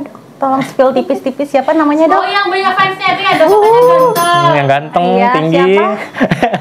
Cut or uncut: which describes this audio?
uncut